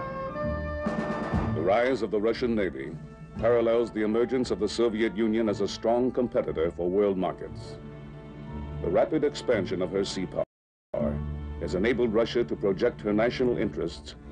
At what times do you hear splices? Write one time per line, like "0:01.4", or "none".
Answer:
0:08.9